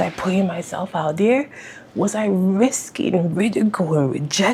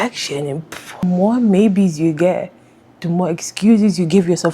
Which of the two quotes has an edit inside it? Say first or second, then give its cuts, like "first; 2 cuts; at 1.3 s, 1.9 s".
second; 1 cut; at 1.0 s